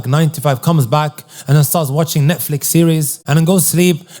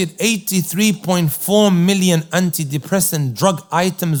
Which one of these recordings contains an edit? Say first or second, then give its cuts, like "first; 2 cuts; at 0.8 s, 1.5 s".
first; 1 cut; at 3.2 s